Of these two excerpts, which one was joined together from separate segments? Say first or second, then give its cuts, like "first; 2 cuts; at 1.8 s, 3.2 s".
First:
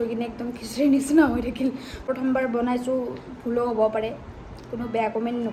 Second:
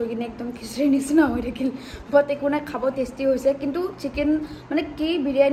first; 1 cut; at 2.1 s